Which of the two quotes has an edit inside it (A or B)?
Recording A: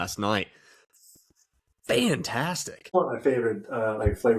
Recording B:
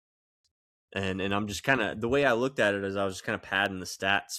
A